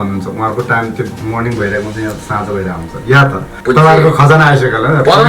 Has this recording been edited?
yes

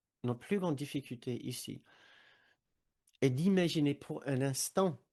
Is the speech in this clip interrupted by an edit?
no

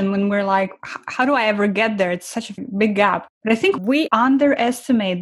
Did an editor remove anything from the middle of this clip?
yes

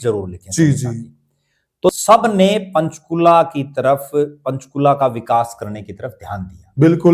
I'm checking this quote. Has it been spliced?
yes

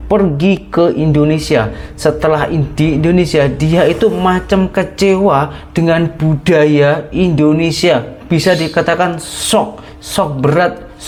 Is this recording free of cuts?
yes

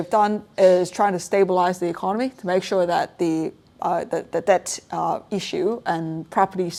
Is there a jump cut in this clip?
no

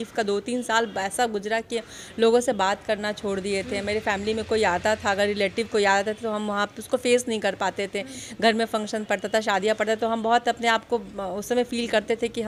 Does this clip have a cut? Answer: no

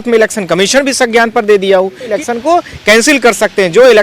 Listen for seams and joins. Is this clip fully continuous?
no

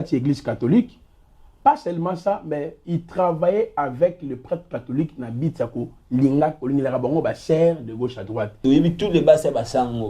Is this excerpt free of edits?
no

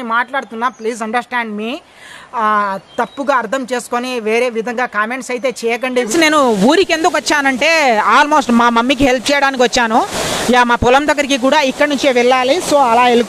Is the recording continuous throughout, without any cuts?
no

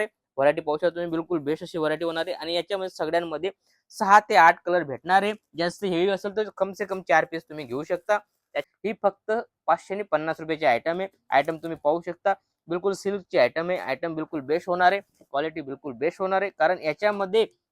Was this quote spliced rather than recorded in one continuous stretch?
yes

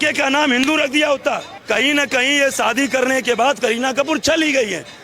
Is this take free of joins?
no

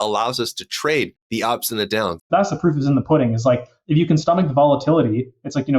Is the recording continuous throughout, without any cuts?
no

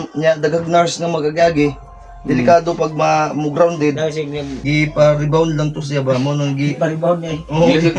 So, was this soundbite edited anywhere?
yes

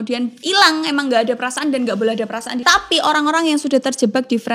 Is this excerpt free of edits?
no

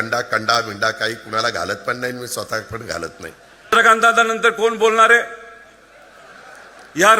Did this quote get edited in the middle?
yes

